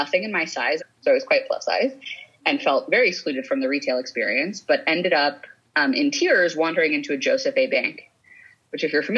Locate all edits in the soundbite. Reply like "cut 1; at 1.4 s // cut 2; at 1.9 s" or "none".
cut 1; at 0.9 s